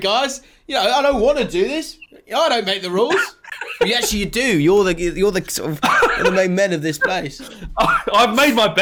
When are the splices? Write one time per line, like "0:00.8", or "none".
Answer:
none